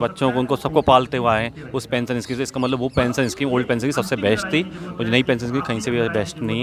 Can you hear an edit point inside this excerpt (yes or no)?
no